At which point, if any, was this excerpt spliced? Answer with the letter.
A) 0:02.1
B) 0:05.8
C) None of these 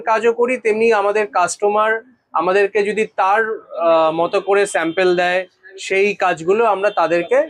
C